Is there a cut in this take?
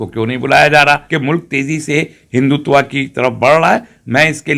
yes; 1 cut; at 1.0 s

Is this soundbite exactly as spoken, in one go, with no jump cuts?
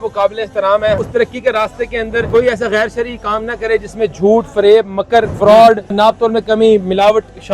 no; 4 cuts; at 1.0 s, 2.3 s, 5.3 s, 6.0 s

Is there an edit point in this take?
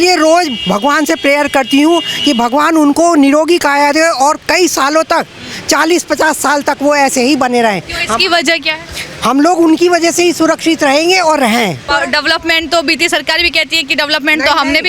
yes; 1 cut; at 11.9 s

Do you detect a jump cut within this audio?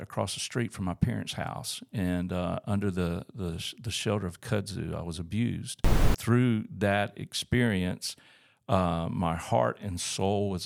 yes; 1 cut; at 6.1 s

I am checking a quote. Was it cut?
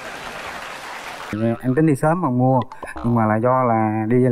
yes; 1 cut; at 1.3 s

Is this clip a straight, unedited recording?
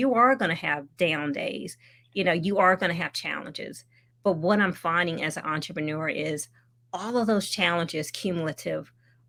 yes; 0 cuts

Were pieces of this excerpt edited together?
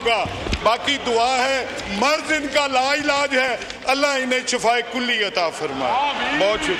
no; 0 cuts

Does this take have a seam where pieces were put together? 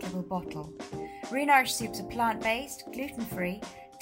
no; 0 cuts

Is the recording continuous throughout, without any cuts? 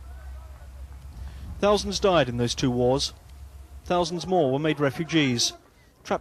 no; 1 cut; at 2.2 s

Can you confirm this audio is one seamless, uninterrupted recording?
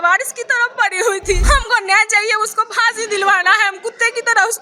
no; 1 cut; at 1.4 s

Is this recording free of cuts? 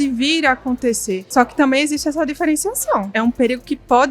no; 2 cuts; at 1.2 s, 3.1 s

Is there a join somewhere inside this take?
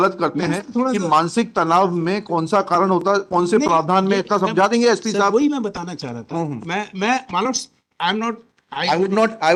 no; 0 cuts

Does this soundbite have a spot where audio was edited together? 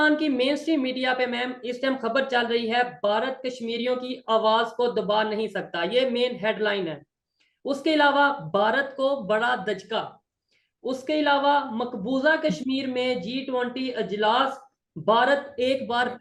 no; 0 cuts

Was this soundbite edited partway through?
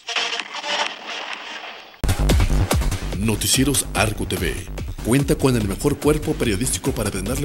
yes; 1 cut; at 2.1 s

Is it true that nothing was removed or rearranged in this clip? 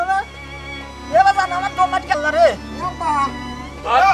no; 1 cut; at 2.2 s

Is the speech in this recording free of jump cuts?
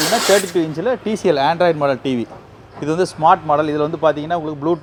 yes; 0 cuts

